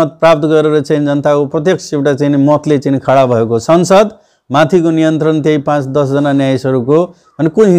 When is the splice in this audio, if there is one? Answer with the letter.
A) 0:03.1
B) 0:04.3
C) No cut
C